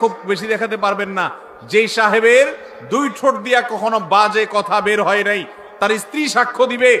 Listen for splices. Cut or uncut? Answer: uncut